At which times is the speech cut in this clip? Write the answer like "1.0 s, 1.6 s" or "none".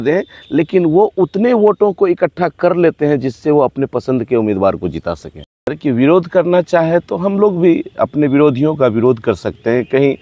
5.8 s

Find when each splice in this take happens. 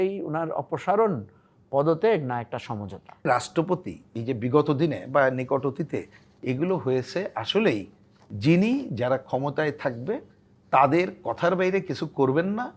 3.3 s

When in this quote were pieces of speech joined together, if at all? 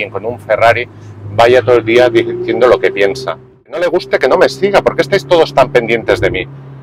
3.8 s

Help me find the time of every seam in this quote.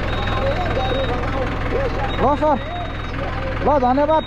none

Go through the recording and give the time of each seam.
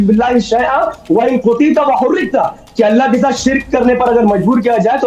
none

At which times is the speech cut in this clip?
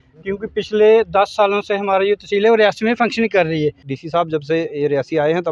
3.9 s

